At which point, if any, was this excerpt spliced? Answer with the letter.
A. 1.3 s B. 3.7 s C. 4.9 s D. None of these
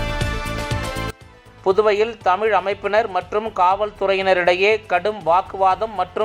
A